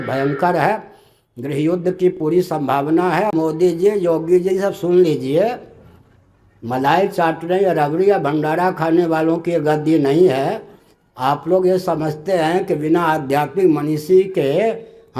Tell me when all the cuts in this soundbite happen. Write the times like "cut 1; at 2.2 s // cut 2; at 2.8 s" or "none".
cut 1; at 3.3 s